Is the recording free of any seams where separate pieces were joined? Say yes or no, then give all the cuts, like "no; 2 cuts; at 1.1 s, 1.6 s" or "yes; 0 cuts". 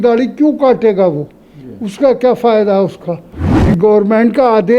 no; 1 cut; at 3.6 s